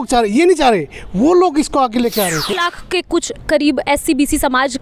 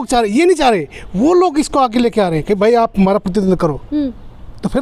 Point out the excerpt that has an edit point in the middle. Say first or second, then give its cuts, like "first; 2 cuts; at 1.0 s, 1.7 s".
first; 1 cut; at 2.6 s